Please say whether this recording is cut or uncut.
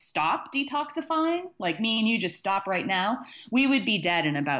uncut